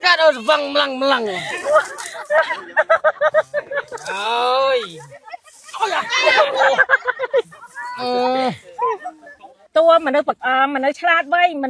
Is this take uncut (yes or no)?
no